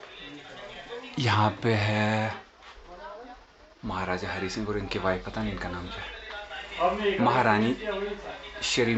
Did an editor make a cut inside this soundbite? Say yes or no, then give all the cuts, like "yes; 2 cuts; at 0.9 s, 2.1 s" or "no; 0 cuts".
no; 0 cuts